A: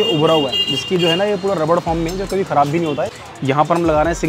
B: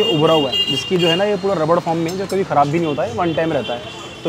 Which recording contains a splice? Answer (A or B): A